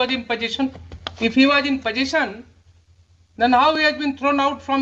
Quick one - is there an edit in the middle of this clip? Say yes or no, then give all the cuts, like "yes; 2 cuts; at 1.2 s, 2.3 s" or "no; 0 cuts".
no; 0 cuts